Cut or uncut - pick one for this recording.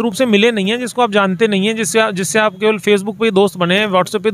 uncut